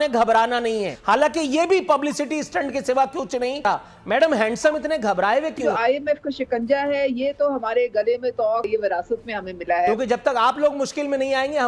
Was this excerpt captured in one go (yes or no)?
no